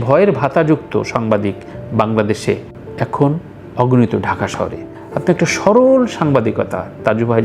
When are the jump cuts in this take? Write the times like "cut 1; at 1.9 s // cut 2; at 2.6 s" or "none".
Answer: cut 1; at 4.9 s